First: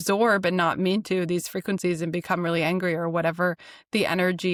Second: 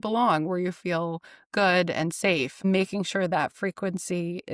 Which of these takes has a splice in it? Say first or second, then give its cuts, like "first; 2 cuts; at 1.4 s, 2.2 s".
second; 1 cut; at 2.6 s